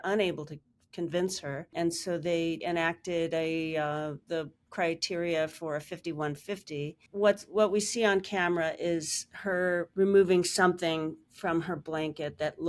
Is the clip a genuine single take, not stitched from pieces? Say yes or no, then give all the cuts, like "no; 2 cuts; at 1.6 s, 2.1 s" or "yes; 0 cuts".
no; 2 cuts; at 2.6 s, 7.1 s